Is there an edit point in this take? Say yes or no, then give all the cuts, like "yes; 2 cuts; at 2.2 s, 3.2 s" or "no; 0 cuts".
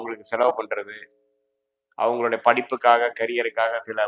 no; 0 cuts